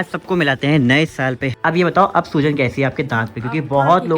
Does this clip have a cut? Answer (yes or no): yes